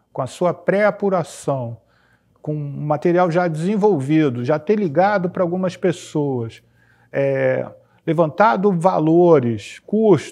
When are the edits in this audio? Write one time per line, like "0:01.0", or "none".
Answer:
none